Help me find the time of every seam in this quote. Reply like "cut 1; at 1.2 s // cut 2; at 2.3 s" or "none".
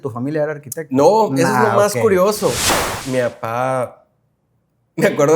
cut 1; at 2.7 s